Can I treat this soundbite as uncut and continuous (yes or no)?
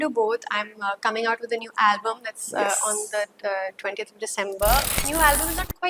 no